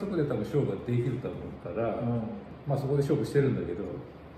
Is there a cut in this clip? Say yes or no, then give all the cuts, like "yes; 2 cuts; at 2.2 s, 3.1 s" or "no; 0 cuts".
no; 0 cuts